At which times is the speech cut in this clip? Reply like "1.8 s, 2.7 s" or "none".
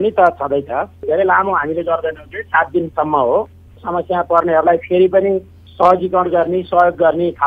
1.1 s, 3.8 s, 5.6 s